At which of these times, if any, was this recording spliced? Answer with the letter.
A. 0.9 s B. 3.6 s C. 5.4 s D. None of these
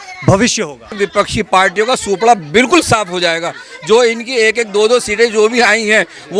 A